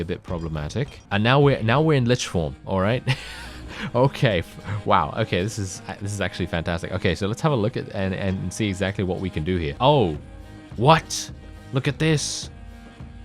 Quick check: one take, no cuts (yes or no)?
no